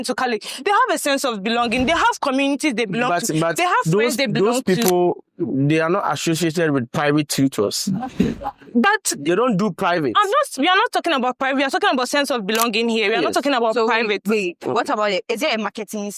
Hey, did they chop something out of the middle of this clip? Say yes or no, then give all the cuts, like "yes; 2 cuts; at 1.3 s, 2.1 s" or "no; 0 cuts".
no; 0 cuts